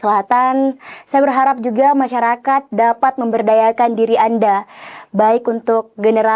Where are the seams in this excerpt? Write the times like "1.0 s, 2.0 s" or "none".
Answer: none